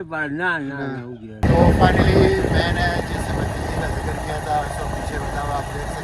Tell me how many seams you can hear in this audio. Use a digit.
1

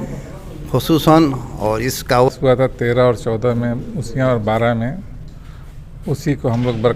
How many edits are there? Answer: 1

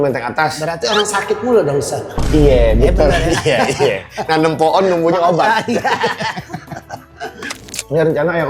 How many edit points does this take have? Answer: 0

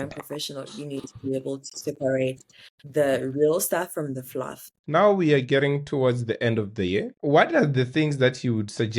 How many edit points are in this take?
2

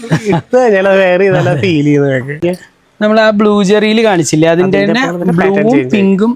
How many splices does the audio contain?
1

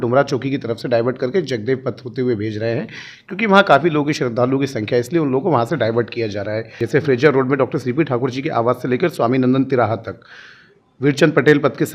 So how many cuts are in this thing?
1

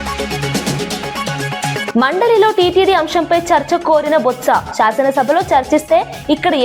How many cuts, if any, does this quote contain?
0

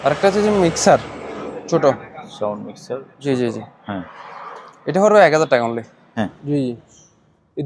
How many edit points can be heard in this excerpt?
1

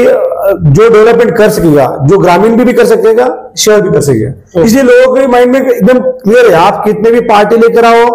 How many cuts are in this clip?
0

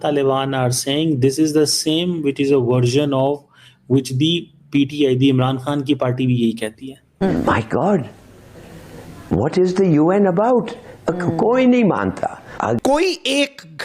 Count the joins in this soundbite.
2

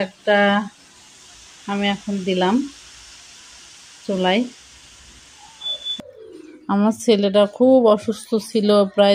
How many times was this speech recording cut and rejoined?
1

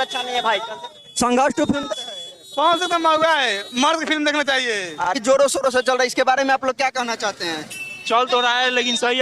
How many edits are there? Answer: 2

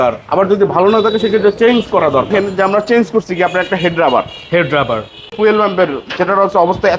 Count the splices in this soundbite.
2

